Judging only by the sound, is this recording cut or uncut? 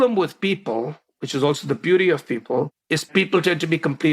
cut